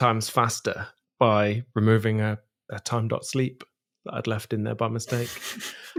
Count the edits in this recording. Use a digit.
0